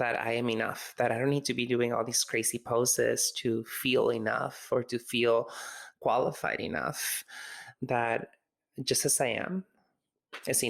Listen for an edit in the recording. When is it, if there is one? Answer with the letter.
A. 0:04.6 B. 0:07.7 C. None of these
B